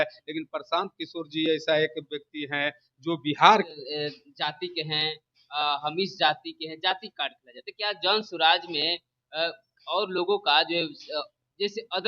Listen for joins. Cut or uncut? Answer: cut